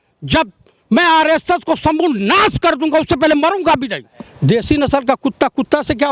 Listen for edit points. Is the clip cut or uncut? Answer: cut